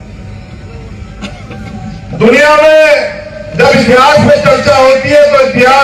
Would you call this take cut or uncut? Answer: uncut